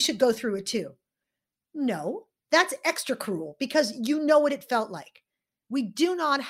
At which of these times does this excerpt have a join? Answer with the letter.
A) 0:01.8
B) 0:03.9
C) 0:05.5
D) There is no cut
C